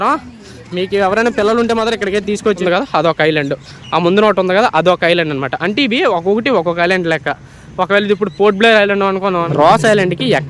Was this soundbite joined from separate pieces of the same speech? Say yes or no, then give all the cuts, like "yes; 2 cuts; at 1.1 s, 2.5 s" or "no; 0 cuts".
yes; 2 cuts; at 2.6 s, 9.5 s